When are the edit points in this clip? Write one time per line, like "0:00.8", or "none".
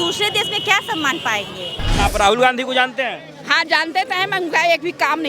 0:02.0